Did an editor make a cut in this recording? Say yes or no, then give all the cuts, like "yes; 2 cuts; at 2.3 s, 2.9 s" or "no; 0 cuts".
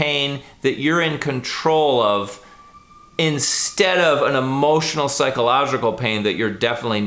no; 0 cuts